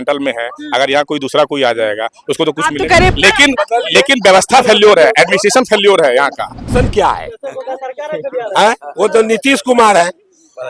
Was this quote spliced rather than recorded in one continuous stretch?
yes; 2 cuts; at 3.1 s, 6.7 s

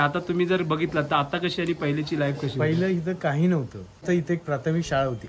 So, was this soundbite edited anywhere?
yes; 1 cut; at 4.0 s

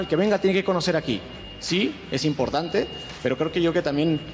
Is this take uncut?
yes; 0 cuts

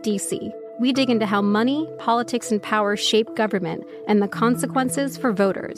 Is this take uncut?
yes; 0 cuts

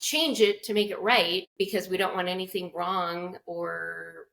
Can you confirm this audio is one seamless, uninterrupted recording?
no; 1 cut; at 1.5 s

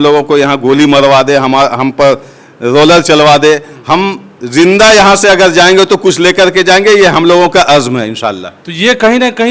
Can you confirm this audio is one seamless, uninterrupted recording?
yes; 0 cuts

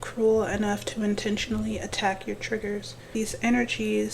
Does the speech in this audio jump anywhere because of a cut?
yes; 1 cut; at 3.1 s

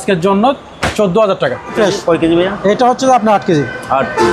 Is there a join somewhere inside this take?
yes; 1 cut; at 1.7 s

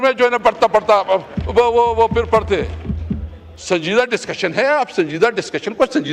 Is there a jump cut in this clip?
no; 0 cuts

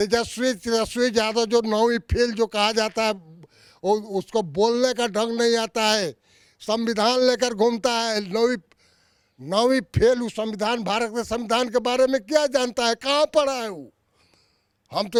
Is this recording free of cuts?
yes; 0 cuts

